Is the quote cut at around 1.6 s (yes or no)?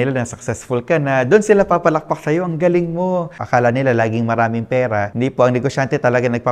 no